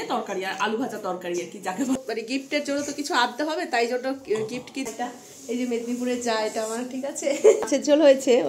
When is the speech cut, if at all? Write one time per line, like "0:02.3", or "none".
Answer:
0:02.0
0:04.9
0:07.6